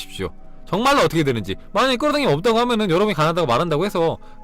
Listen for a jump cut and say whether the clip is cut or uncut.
uncut